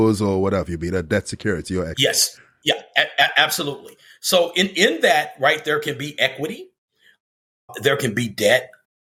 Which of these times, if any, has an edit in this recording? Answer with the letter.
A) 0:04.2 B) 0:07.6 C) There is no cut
C